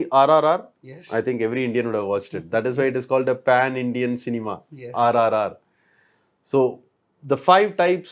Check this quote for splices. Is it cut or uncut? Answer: uncut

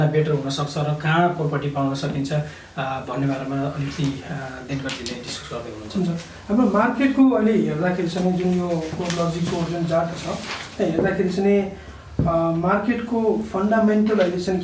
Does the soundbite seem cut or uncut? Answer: uncut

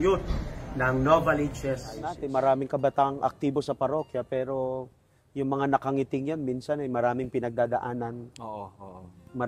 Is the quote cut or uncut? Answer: cut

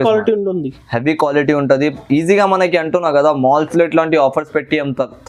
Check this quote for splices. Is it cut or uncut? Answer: uncut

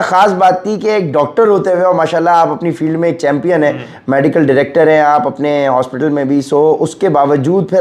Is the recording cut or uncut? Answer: uncut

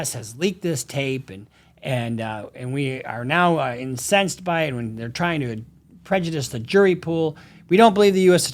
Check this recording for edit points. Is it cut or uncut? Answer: uncut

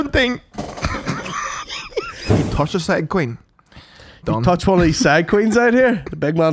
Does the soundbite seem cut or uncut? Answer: cut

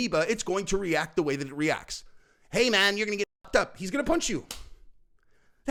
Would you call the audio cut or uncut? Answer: uncut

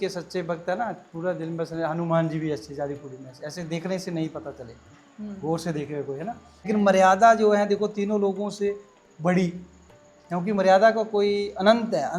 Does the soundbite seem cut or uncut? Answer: uncut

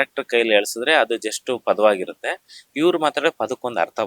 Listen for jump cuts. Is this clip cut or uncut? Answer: uncut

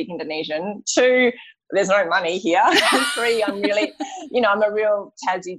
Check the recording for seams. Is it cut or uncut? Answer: uncut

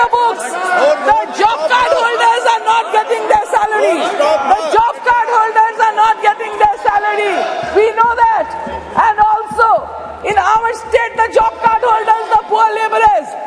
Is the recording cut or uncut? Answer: uncut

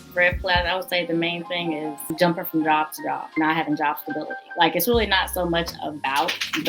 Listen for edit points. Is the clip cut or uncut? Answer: cut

